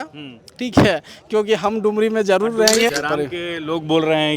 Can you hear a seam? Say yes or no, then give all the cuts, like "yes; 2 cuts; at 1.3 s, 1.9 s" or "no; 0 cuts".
yes; 1 cut; at 2.9 s